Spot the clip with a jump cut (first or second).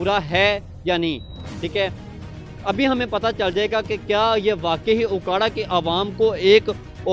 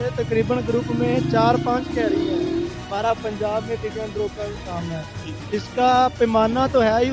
first